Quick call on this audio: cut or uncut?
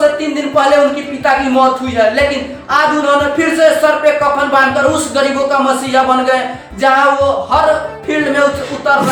uncut